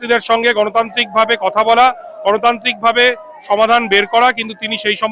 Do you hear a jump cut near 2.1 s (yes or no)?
no